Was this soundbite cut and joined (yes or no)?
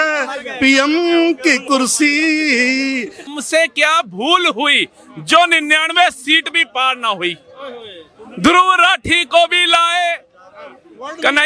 yes